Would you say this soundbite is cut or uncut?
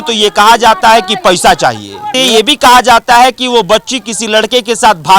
cut